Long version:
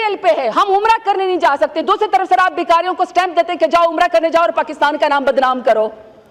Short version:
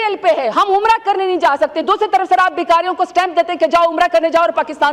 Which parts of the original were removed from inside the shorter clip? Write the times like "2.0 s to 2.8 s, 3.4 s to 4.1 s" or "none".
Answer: none